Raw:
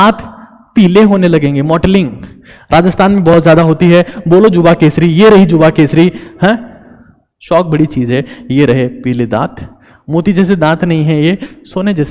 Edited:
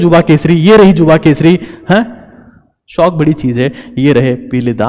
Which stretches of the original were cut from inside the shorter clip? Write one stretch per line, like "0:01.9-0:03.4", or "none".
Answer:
none